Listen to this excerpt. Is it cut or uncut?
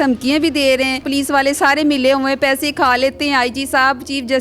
cut